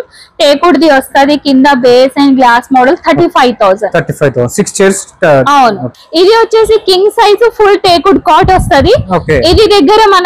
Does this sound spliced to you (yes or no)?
yes